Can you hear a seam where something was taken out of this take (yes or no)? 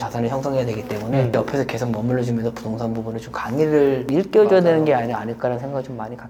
no